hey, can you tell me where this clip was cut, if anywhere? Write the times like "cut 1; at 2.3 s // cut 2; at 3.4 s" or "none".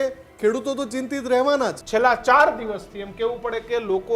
cut 1; at 1.8 s